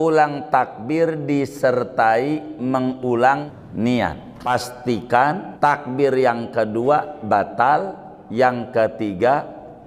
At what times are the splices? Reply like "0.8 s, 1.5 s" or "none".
3.5 s, 4.5 s, 5.5 s